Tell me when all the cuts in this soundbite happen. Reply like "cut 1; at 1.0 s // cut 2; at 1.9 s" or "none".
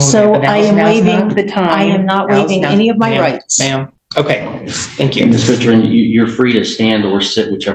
none